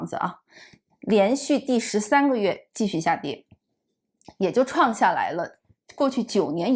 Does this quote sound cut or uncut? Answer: uncut